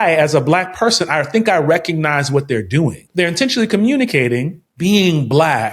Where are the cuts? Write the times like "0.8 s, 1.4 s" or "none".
3.0 s, 4.6 s

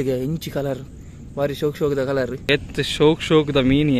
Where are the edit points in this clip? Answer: 2.4 s

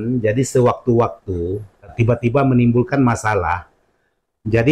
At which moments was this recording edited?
2.3 s

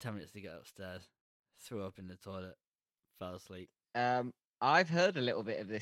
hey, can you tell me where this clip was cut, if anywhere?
3.8 s

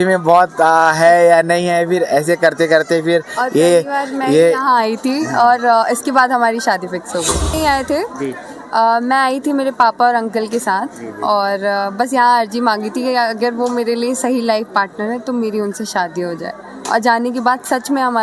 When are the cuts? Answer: 7.5 s

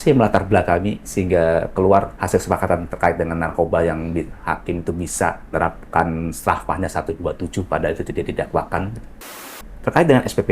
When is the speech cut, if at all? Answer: 1.0 s, 2.1 s, 5.5 s, 9.5 s

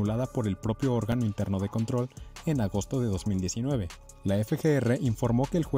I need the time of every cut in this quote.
none

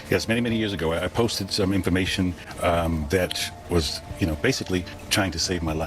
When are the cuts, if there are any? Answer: 3.8 s, 5.0 s

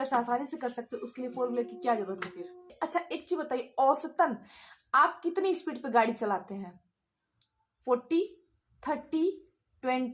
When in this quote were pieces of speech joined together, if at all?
2.7 s

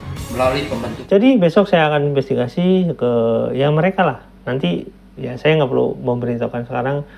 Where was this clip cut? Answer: 0.9 s

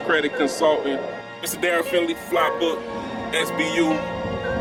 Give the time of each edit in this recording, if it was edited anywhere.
none

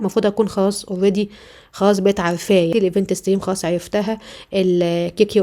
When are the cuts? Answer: 2.7 s

